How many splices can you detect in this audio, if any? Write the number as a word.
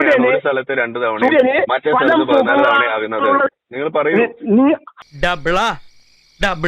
one